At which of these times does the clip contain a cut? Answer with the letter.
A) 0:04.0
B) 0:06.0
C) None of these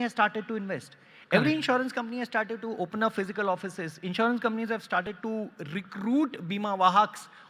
C